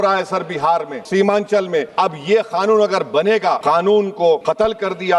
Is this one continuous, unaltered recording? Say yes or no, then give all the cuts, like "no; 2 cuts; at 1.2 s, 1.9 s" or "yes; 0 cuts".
no; 4 cuts; at 1.0 s, 1.9 s, 3.6 s, 4.4 s